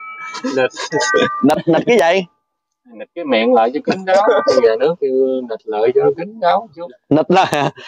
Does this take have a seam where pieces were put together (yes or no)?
yes